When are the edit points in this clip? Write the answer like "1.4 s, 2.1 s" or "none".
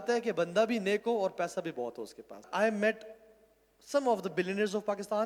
2.5 s